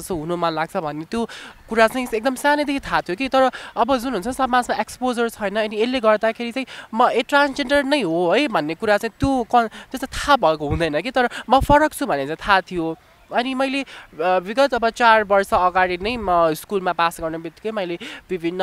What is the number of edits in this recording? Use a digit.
0